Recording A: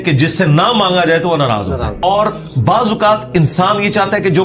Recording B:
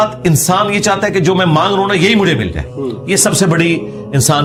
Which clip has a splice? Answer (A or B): A